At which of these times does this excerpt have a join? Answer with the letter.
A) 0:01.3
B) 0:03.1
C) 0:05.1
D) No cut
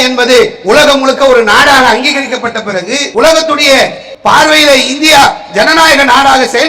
B